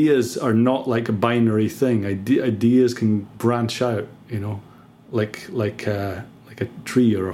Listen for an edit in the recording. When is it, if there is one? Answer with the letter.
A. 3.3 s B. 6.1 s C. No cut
A